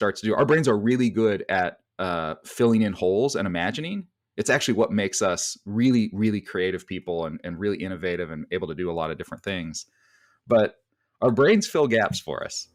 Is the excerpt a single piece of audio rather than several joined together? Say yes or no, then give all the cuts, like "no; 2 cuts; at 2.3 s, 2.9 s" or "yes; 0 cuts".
yes; 0 cuts